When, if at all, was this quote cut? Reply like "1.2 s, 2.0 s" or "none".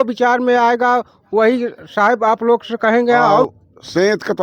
3.5 s